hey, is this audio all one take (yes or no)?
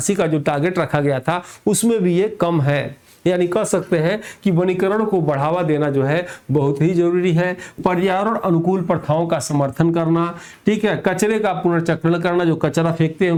yes